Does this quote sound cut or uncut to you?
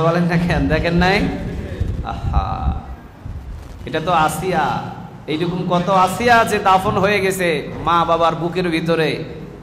uncut